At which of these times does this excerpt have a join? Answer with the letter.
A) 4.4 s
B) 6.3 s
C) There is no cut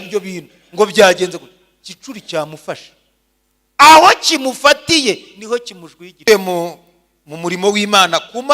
B